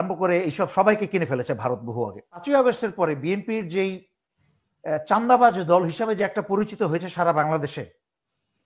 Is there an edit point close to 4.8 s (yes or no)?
no